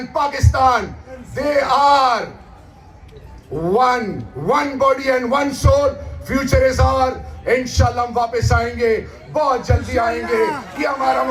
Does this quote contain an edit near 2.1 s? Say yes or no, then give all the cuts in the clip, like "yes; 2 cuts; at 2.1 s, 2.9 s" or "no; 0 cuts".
no; 0 cuts